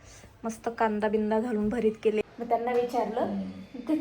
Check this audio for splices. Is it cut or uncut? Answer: cut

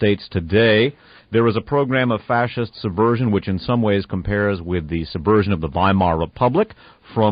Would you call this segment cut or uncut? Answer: uncut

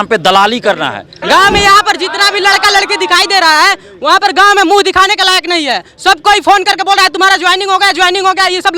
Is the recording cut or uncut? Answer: cut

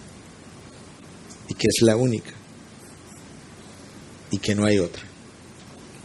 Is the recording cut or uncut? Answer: uncut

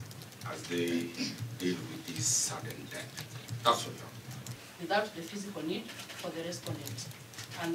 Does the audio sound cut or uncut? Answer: cut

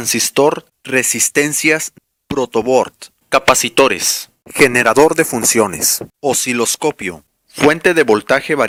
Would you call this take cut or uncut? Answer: uncut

